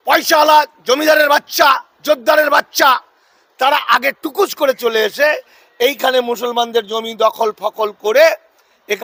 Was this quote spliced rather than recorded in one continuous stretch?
no; 0 cuts

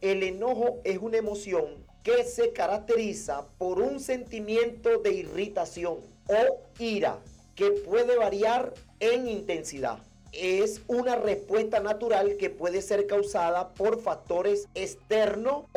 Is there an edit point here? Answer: no; 0 cuts

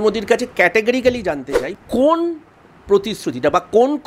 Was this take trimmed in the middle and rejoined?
yes; 1 cut; at 1.6 s

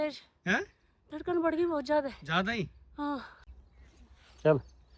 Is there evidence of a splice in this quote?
yes; 1 cut; at 3.4 s

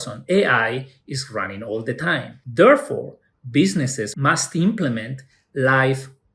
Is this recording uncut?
no; 2 cuts; at 2.4 s, 4.1 s

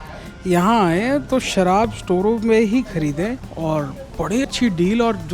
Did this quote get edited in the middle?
yes; 2 cuts; at 3.5 s, 4.5 s

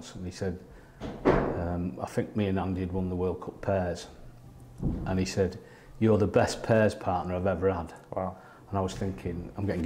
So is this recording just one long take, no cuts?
yes; 0 cuts

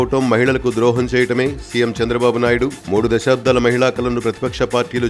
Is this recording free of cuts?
yes; 0 cuts

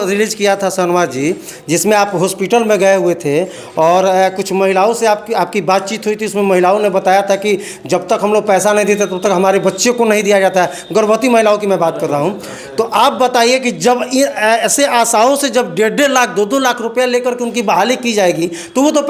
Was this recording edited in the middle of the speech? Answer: no; 0 cuts

